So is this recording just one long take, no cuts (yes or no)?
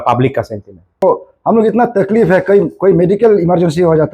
no